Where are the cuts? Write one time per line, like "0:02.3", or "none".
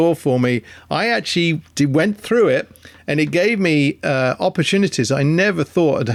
none

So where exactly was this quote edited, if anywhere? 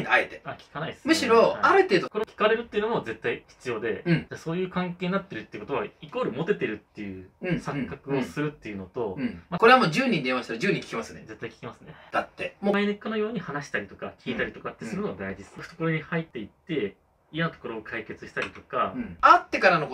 0:02.1
0:04.2
0:09.4
0:12.7
0:15.7
0:19.1

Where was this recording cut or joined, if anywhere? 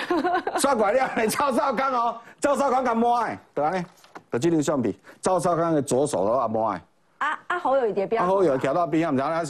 none

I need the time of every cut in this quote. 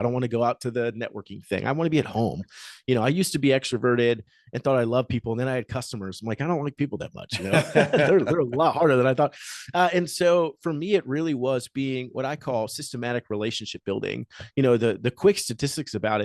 none

